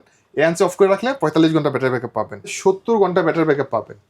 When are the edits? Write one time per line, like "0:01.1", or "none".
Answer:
0:02.5